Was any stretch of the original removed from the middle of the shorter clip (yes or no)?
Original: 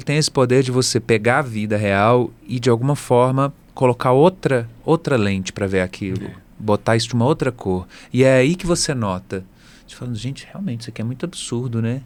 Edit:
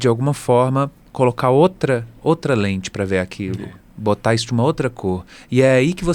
no